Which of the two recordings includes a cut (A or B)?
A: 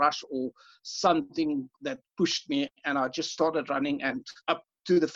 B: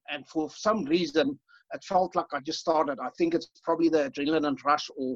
A